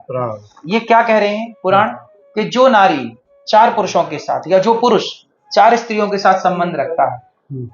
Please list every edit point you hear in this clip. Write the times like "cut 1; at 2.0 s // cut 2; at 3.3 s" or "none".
none